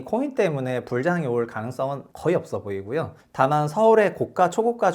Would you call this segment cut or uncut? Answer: cut